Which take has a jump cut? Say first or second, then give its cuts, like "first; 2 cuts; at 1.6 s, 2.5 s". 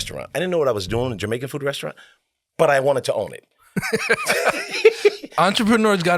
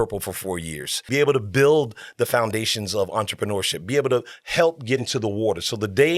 second; 2 cuts; at 1.0 s, 5.0 s